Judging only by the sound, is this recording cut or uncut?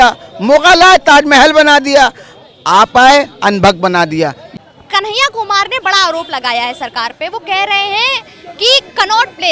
uncut